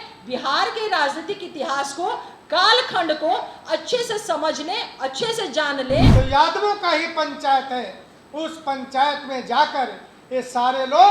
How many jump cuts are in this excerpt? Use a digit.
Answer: 1